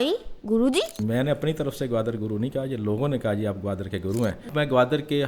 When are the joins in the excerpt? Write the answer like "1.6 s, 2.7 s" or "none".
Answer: 1.0 s, 4.5 s